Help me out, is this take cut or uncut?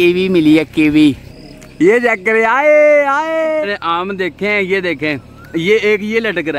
cut